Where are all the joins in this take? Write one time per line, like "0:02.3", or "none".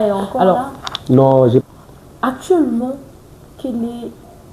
0:01.6